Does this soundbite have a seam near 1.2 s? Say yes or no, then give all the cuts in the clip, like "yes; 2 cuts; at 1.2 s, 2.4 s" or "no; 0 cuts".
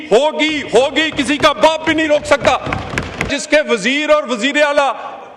no; 1 cut; at 3.3 s